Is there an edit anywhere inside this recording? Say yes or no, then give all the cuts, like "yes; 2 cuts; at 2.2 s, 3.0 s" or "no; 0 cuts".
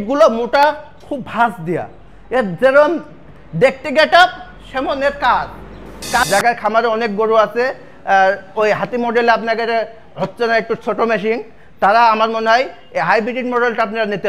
yes; 1 cut; at 6.2 s